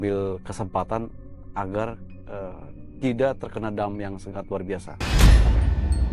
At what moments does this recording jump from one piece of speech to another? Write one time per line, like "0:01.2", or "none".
0:04.9